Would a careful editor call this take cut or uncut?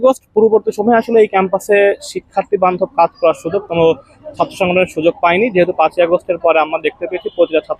uncut